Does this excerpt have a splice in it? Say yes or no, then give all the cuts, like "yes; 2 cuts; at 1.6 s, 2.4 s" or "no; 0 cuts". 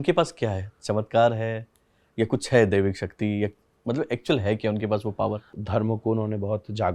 yes; 1 cut; at 5.6 s